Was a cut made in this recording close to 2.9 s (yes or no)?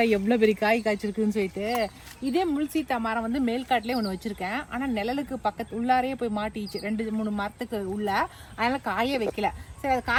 no